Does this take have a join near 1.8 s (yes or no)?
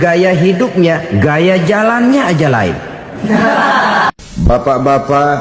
no